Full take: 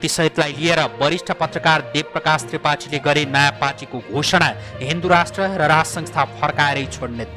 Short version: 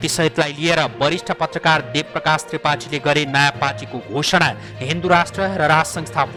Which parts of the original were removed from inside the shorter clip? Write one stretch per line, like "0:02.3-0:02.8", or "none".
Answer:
none